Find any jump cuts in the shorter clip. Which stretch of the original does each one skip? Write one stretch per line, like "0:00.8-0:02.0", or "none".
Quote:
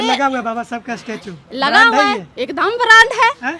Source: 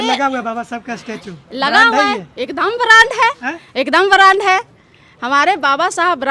none